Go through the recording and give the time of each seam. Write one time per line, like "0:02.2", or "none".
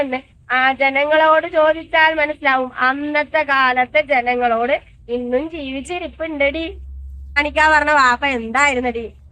0:07.4